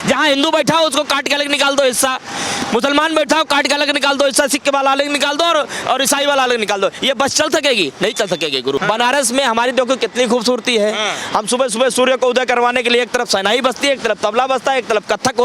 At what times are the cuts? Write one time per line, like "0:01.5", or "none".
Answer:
0:08.8